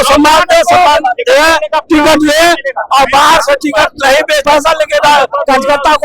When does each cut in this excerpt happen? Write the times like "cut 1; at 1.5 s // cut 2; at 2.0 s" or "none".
cut 1; at 4.4 s